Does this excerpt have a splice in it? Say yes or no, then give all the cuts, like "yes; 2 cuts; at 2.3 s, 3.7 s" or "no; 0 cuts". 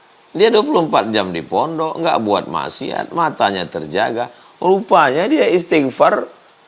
no; 0 cuts